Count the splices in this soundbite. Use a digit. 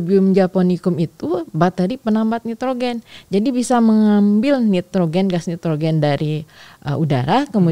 0